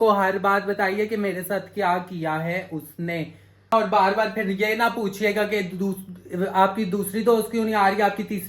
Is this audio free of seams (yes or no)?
no